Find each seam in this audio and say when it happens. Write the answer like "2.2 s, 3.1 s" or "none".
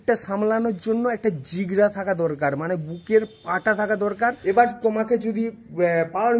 4.4 s